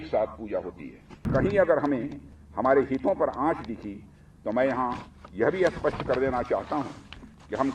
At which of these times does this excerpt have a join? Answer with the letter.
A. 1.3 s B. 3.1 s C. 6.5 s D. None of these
A